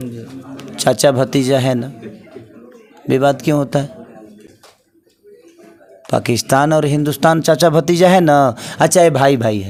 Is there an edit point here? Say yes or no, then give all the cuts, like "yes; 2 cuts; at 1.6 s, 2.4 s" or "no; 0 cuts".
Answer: no; 0 cuts